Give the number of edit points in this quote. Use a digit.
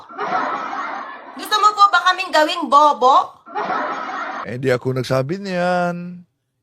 1